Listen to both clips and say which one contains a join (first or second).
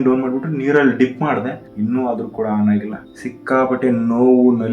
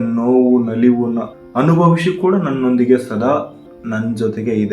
first